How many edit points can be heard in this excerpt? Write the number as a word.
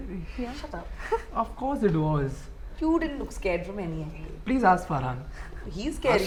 zero